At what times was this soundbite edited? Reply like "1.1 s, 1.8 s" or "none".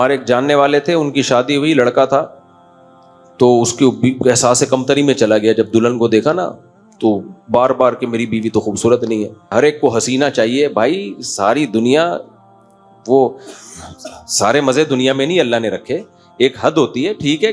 9.5 s